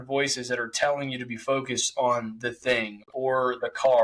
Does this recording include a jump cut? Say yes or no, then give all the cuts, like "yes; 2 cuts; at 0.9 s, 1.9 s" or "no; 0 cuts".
no; 0 cuts